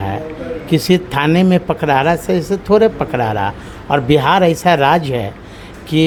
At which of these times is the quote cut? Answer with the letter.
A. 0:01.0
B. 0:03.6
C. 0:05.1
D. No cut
D